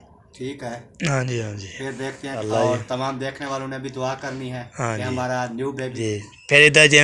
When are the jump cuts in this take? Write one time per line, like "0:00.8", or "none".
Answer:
0:02.4
0:06.0